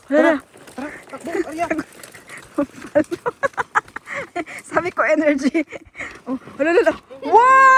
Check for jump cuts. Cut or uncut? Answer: uncut